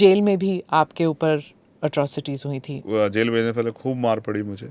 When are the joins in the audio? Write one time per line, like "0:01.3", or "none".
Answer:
0:02.8